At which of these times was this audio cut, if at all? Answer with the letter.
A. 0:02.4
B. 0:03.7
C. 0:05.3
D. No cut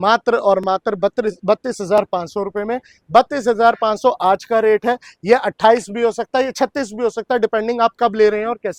D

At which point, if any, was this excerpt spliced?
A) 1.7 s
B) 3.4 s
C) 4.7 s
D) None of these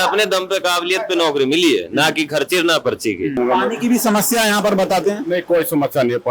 B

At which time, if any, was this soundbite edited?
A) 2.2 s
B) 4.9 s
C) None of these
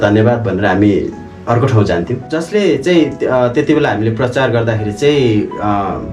A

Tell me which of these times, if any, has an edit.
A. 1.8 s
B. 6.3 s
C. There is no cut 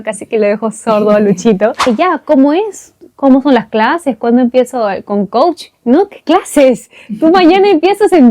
A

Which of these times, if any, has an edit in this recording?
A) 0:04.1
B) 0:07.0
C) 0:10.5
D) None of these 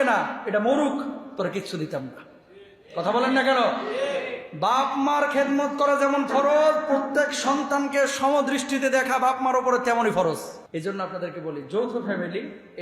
C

